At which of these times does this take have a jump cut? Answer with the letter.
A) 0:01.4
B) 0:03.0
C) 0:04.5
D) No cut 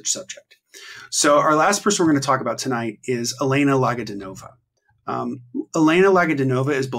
D